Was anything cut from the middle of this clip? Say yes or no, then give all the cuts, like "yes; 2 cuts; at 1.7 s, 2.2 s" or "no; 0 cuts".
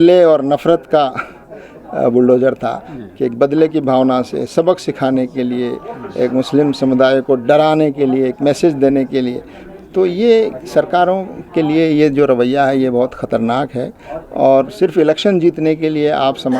no; 0 cuts